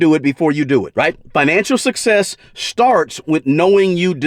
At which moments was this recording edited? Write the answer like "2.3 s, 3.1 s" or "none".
none